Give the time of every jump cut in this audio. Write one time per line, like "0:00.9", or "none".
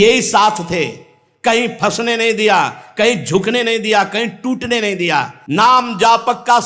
0:05.4